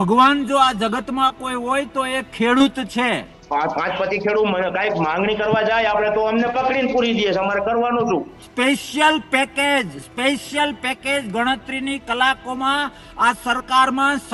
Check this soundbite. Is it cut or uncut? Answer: cut